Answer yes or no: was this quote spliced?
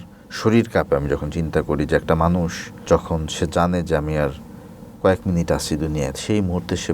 yes